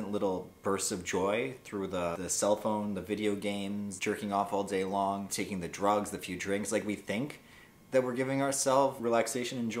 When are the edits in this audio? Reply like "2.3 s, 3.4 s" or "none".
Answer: 2.1 s, 3.9 s, 5.3 s, 9.0 s